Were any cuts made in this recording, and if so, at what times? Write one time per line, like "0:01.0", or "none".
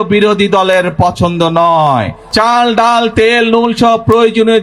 0:02.2